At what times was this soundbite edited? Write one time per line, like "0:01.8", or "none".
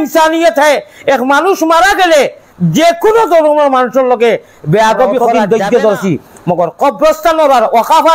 0:05.3